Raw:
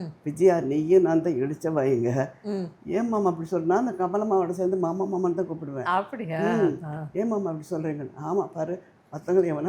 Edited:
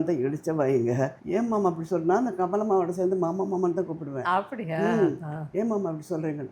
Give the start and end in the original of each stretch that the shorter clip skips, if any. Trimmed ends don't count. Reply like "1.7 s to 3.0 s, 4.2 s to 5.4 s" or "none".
2.4 s to 2.8 s